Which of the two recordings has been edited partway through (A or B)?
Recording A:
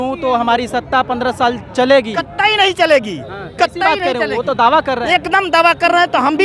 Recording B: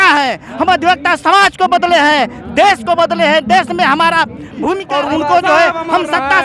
B